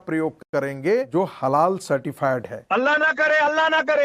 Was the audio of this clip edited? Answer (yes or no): yes